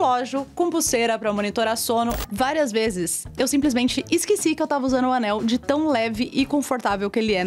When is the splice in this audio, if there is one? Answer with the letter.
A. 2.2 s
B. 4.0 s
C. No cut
A